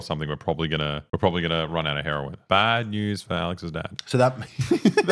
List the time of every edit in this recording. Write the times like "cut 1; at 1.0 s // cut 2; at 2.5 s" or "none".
cut 1; at 1.0 s // cut 2; at 2.4 s